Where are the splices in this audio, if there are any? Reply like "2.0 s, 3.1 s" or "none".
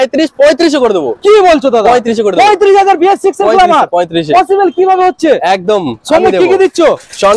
none